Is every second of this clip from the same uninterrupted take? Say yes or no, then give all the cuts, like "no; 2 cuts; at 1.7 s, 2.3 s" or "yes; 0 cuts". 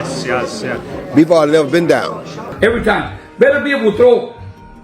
no; 1 cut; at 2.5 s